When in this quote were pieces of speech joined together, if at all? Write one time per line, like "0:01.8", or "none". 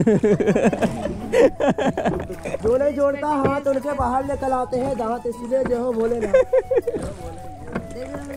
0:02.4